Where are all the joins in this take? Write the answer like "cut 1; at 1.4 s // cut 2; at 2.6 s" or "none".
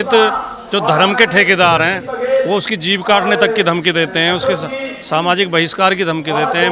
none